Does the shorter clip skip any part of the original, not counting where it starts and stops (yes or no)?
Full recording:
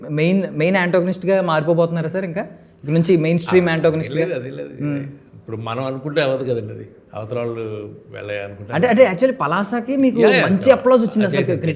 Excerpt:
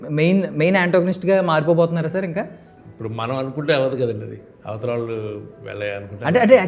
yes